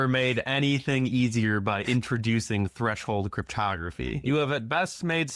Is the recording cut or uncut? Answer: cut